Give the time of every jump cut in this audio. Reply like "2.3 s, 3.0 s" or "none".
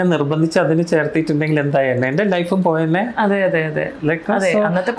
none